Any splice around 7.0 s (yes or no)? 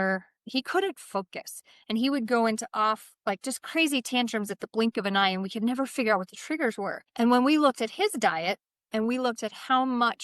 yes